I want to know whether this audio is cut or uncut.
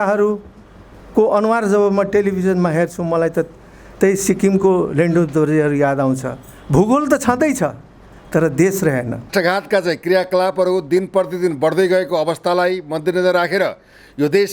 cut